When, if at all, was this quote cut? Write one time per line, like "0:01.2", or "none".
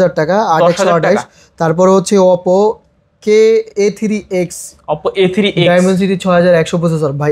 none